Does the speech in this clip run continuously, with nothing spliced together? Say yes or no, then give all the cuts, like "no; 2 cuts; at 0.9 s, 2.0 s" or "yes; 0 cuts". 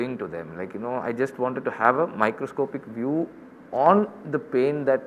yes; 0 cuts